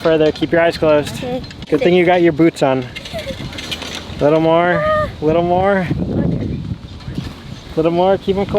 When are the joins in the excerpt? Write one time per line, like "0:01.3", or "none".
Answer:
none